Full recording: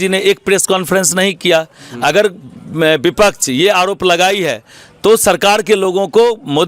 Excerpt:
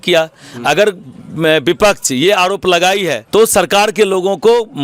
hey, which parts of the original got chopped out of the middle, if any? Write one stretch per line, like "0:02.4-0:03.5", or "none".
0:04.6-0:04.9